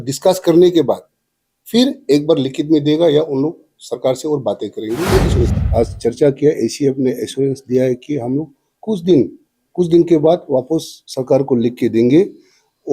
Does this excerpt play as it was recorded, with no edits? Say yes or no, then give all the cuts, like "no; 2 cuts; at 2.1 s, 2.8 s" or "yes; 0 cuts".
no; 1 cut; at 5.6 s